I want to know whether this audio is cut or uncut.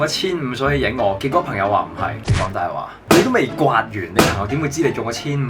uncut